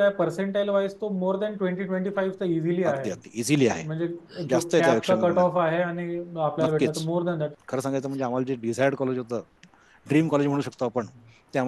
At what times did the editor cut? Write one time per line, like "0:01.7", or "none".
0:07.5